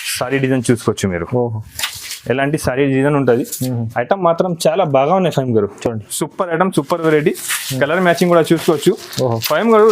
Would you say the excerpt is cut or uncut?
uncut